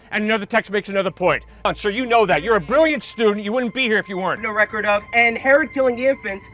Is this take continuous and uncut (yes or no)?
no